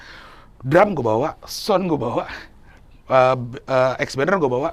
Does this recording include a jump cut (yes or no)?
no